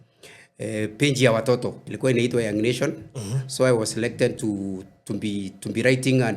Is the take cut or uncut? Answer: cut